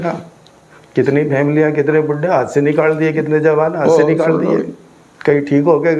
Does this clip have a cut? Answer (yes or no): no